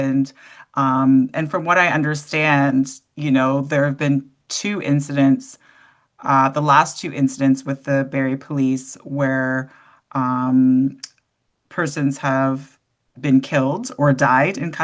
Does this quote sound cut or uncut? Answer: uncut